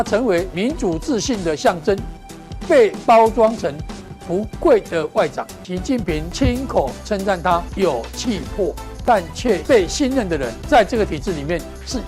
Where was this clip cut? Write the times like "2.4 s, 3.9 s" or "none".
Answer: 5.9 s, 7.7 s, 9.3 s, 10.5 s